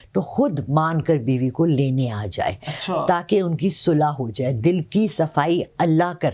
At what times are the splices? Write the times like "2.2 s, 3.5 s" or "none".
none